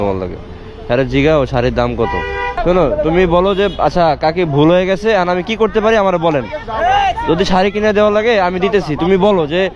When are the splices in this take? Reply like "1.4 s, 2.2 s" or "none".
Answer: 2.6 s